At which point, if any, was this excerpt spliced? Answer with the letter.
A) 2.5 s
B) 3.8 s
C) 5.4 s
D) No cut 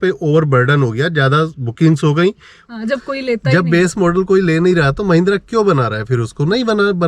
A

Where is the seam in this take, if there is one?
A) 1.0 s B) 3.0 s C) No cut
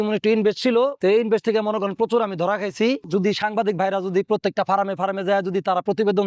B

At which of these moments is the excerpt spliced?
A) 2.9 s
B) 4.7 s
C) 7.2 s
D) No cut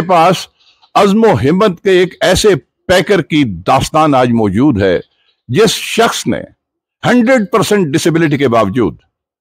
D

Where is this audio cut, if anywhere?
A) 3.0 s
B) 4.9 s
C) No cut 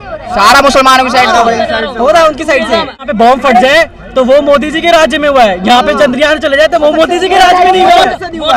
A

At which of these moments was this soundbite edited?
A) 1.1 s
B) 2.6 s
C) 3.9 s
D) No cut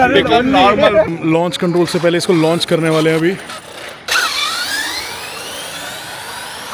A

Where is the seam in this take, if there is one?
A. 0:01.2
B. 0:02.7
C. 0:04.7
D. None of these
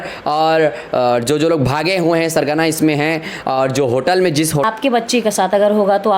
C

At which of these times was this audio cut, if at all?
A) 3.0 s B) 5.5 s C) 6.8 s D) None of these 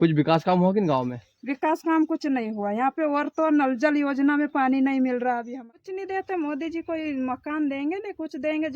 B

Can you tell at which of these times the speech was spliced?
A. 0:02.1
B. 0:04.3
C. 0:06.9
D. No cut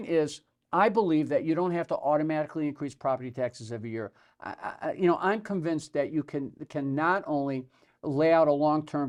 D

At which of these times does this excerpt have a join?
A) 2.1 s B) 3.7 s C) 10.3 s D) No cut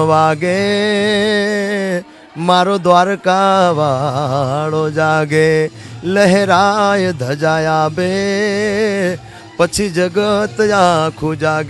D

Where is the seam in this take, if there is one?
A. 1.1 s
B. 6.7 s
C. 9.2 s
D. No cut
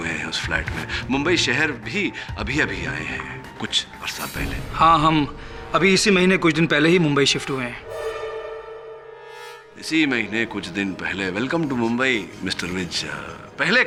D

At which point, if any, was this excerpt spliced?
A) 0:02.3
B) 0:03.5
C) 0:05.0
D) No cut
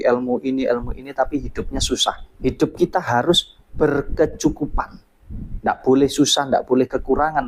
A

